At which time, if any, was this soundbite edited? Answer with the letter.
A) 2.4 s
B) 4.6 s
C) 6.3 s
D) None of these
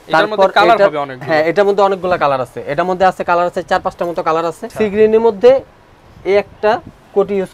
B